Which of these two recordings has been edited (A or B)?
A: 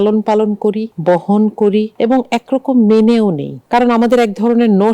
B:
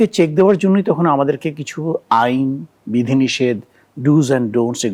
A